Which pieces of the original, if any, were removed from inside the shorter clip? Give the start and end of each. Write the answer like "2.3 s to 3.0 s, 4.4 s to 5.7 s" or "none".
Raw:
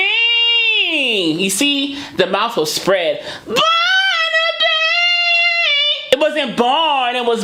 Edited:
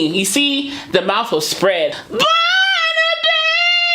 3.3 s to 3.4 s